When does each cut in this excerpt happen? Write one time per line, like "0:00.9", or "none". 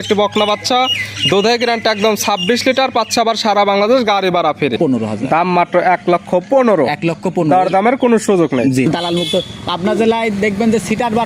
0:04.8
0:08.9